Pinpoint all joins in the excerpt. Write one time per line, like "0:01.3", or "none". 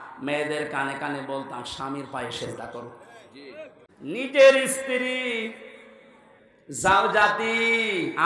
0:03.8